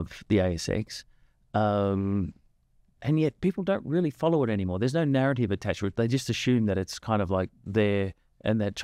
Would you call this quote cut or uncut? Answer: uncut